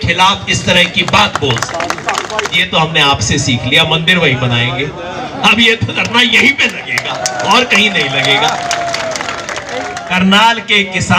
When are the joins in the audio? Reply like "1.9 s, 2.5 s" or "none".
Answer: 2.6 s, 10.0 s